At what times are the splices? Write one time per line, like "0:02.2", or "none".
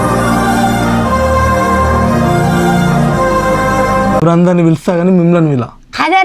0:03.7